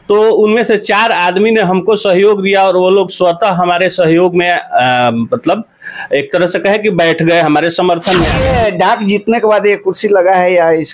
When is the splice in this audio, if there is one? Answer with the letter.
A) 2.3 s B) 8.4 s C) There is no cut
B